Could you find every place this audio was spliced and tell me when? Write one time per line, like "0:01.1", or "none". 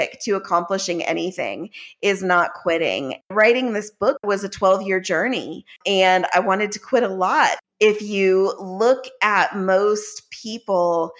0:03.3
0:04.2
0:05.8
0:07.6